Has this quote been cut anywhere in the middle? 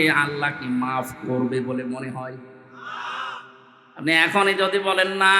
no; 0 cuts

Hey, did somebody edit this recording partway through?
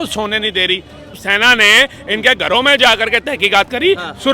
yes; 1 cut; at 1.2 s

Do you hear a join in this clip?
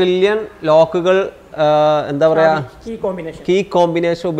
no; 0 cuts

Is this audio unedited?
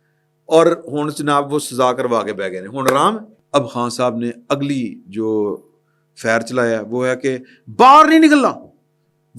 no; 1 cut; at 3.3 s

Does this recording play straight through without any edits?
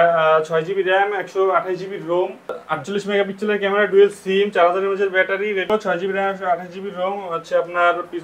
no; 2 cuts; at 2.6 s, 5.7 s

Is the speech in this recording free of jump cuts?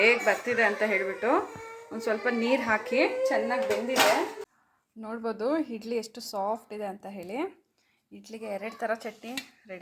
no; 1 cut; at 4.5 s

